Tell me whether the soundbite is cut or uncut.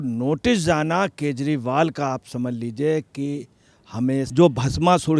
cut